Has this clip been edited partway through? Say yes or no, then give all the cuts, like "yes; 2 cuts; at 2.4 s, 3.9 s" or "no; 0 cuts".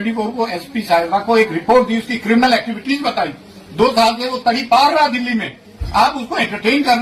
no; 0 cuts